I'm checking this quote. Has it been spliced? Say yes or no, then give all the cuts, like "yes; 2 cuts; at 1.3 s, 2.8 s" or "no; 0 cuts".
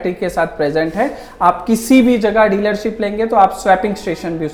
no; 0 cuts